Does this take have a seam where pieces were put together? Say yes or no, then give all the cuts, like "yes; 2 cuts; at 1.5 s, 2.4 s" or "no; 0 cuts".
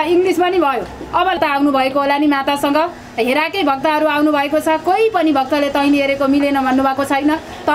yes; 1 cut; at 1.4 s